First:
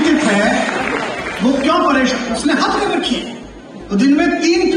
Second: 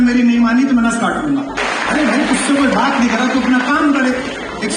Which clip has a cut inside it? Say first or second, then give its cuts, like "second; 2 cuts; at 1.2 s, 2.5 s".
second; 1 cut; at 1.6 s